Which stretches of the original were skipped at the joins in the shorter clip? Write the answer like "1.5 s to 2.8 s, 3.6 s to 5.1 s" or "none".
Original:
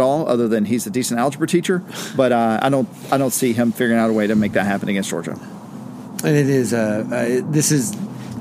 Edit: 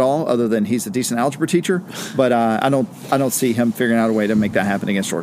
none